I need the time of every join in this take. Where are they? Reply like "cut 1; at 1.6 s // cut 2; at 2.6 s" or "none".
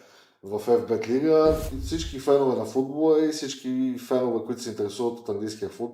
cut 1; at 1.7 s